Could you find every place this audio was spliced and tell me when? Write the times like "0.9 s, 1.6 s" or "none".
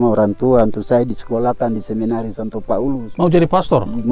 none